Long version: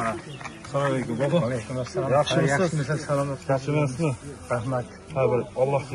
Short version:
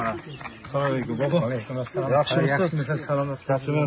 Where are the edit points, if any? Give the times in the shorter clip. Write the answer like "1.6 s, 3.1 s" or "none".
none